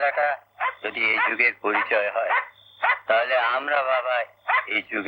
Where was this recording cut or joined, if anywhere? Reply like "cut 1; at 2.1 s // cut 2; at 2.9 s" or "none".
none